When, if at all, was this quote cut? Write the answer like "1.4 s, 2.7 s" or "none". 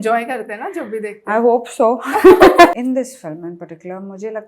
2.7 s

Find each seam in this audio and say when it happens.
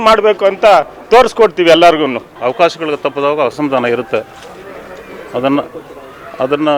2.2 s, 3.5 s

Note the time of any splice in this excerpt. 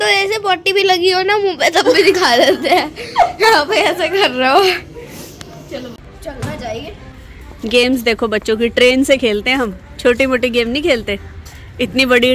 6.0 s, 7.0 s

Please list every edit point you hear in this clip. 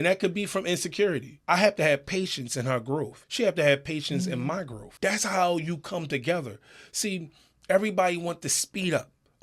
1.3 s, 3.2 s, 4.8 s

